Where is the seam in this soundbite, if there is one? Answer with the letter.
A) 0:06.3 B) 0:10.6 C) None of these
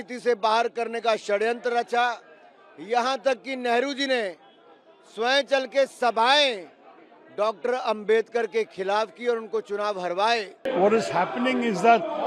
B